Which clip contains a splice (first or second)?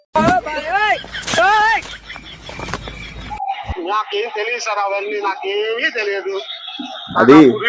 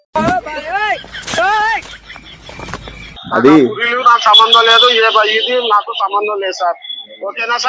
second